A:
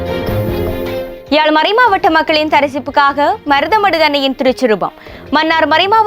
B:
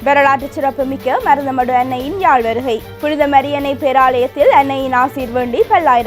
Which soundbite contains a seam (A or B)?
A